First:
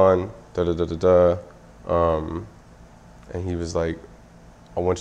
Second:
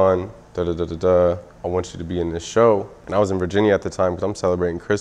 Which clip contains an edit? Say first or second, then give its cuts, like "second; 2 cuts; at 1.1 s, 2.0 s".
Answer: second; 2 cuts; at 1.5 s, 3.0 s